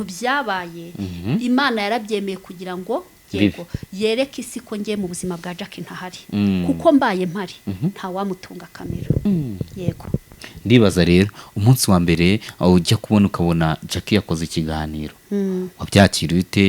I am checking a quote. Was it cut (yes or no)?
no